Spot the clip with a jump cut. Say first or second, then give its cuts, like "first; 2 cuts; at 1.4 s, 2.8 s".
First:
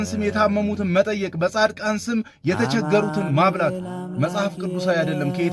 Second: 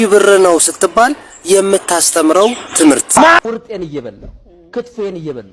second; 1 cut; at 3.4 s